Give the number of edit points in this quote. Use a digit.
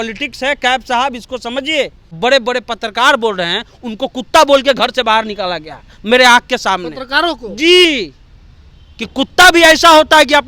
1